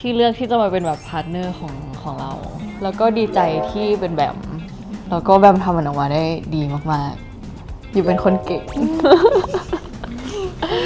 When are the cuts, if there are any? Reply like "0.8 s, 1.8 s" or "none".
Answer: 2.8 s, 5.0 s